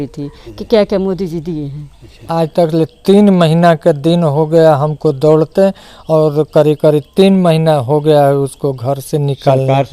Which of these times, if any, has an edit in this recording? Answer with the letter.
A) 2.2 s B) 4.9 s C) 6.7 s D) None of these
A